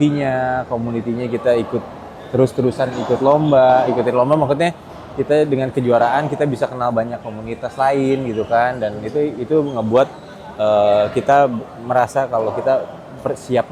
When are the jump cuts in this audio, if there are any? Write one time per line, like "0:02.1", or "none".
none